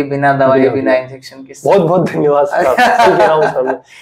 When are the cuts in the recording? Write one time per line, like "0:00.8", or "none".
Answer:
none